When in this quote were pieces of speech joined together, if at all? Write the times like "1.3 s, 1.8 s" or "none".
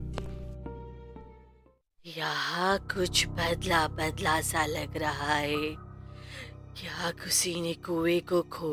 none